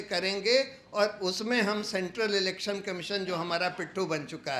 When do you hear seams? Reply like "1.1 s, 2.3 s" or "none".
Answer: none